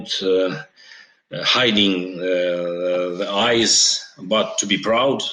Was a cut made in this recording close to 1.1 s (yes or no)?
no